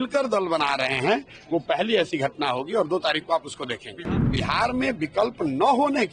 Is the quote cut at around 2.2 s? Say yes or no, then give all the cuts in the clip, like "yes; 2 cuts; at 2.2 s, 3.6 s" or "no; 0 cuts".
no; 1 cut; at 4.1 s